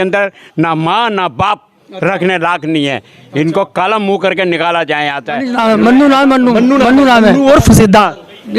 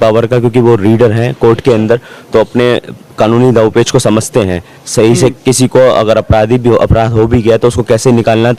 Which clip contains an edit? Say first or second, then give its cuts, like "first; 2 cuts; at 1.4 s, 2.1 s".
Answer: first; 1 cut; at 5.5 s